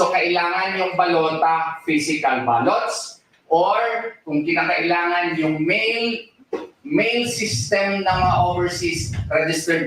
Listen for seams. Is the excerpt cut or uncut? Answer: uncut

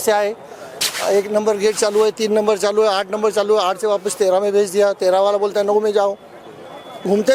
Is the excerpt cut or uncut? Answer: uncut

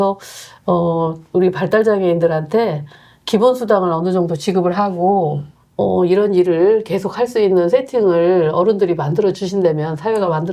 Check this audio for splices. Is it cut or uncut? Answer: uncut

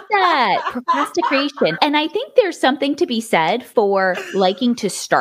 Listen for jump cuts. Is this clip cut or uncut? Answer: cut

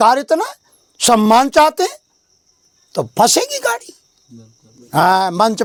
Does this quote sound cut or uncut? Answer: uncut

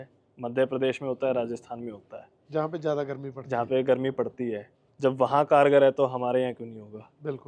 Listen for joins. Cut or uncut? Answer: uncut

